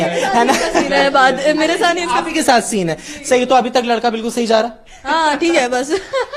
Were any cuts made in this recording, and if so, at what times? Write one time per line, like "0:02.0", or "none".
none